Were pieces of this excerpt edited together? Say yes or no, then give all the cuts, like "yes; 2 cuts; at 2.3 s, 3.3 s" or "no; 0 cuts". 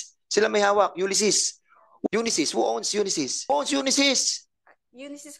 yes; 1 cut; at 1.9 s